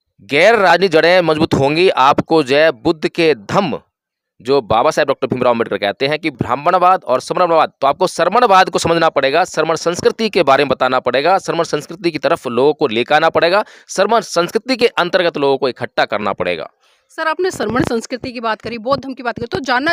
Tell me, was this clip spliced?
no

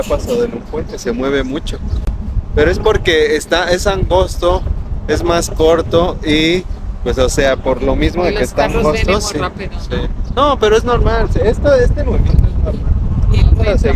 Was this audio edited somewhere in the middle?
no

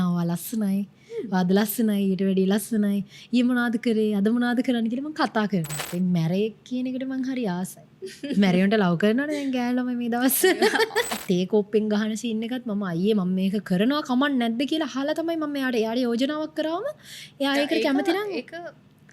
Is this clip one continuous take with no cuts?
no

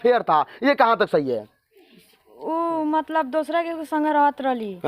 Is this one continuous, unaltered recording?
yes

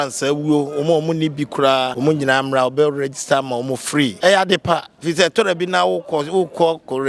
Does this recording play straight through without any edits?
no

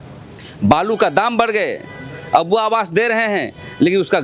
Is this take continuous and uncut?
yes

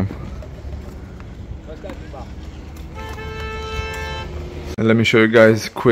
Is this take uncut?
no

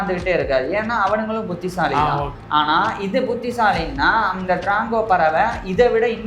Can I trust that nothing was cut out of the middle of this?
no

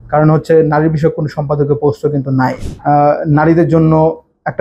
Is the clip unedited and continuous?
no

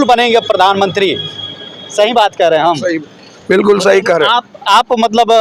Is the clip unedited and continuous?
yes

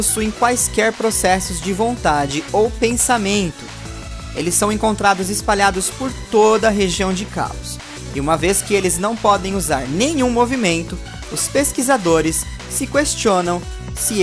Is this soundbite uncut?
no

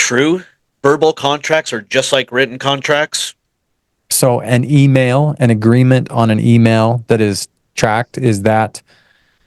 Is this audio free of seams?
no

